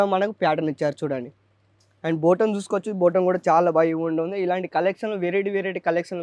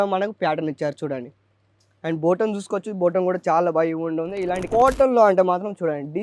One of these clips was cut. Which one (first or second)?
second